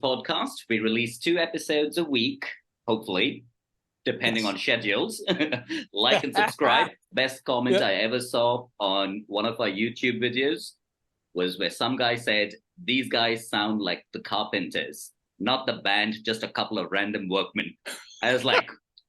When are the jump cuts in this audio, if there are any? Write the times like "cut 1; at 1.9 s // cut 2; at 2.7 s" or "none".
cut 1; at 7.0 s